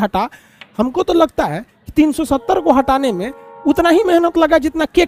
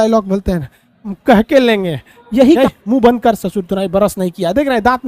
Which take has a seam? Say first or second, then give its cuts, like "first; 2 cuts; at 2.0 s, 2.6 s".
second; 1 cut; at 2.6 s